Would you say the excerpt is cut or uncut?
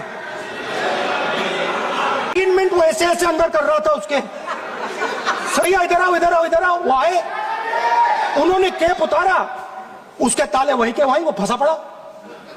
cut